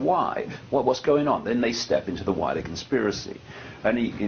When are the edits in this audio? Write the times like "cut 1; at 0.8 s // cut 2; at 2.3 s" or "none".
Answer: cut 1; at 2.7 s